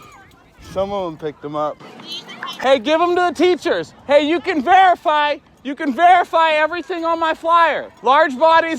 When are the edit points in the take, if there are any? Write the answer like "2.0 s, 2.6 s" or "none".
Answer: 7.9 s